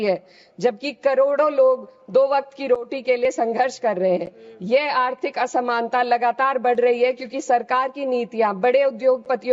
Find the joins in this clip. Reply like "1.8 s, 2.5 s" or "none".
none